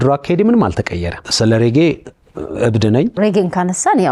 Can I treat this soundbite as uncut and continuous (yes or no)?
no